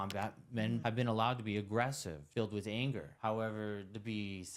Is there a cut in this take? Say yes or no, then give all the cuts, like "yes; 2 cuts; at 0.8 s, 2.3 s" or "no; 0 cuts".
yes; 2 cuts; at 0.8 s, 2.2 s